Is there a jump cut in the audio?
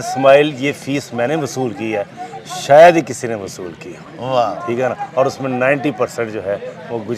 no; 0 cuts

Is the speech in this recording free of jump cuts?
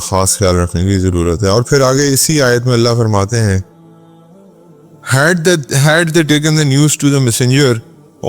no; 2 cuts; at 3.6 s, 5.1 s

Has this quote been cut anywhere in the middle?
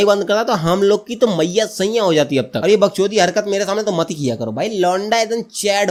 no; 0 cuts

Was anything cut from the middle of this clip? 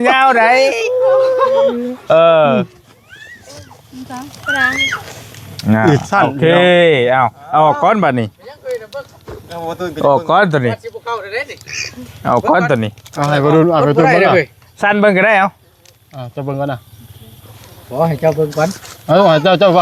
no; 0 cuts

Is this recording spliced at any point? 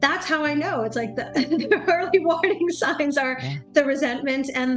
no; 0 cuts

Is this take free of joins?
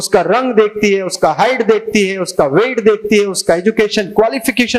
yes; 0 cuts

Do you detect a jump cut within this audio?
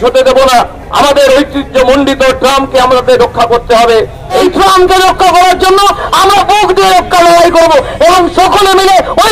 yes; 1 cut; at 4.4 s

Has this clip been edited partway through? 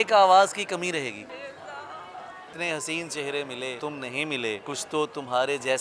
yes; 4 cuts; at 1.3 s, 2.5 s, 3.8 s, 4.6 s

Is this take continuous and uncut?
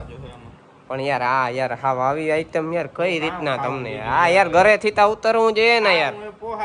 yes; 0 cuts

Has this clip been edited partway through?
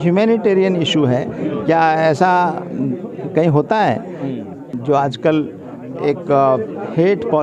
yes; 1 cut; at 4.6 s

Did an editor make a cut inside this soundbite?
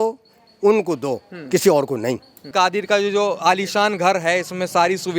yes; 1 cut; at 2.5 s

